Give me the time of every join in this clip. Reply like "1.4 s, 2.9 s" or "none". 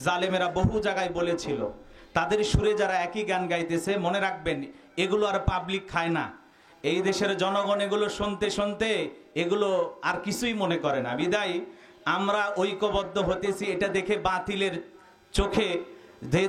none